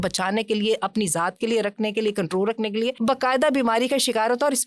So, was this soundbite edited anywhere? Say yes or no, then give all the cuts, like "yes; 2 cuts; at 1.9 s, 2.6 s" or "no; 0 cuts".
yes; 1 cut; at 2.9 s